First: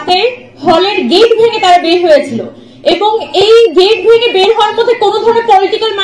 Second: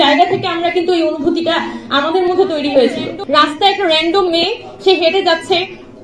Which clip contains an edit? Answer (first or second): second